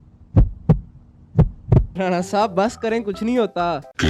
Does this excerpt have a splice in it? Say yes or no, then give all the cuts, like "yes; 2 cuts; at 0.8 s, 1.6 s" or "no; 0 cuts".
yes; 1 cut; at 1.9 s